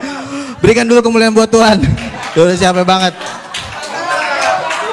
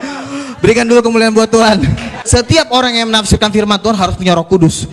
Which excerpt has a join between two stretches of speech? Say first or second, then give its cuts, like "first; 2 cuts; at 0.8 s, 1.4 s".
second; 1 cut; at 2.1 s